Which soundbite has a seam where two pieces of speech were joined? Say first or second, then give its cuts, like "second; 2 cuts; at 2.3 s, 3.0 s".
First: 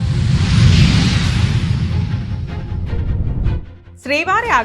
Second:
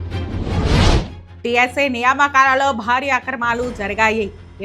second; 1 cut; at 1.2 s